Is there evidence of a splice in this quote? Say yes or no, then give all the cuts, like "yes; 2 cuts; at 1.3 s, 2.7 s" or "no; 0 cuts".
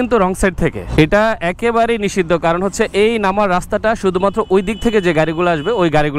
no; 0 cuts